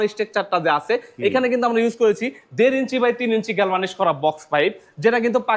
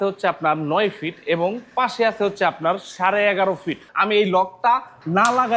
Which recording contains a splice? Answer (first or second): second